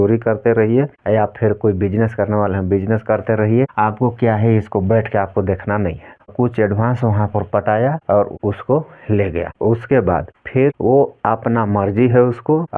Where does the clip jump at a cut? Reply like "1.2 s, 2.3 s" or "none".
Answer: 6.3 s